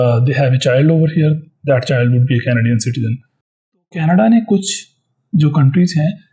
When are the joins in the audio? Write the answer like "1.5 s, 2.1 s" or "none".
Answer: 3.9 s